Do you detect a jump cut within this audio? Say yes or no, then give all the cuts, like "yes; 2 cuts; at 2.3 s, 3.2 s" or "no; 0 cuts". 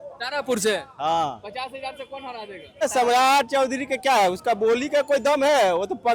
yes; 1 cut; at 2.8 s